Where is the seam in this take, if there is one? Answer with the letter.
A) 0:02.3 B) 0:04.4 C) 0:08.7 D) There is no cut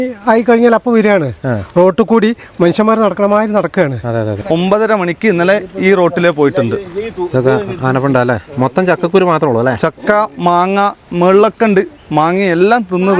B